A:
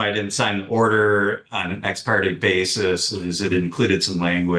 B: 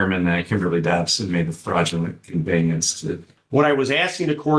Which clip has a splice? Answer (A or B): B